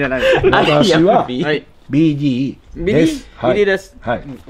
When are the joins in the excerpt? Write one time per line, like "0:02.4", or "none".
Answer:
none